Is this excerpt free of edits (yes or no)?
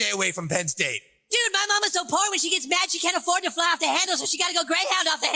yes